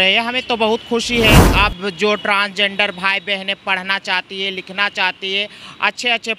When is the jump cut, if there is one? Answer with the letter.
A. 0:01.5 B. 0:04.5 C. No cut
A